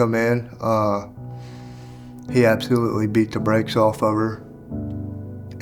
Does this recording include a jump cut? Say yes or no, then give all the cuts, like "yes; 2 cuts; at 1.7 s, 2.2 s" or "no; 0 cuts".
no; 0 cuts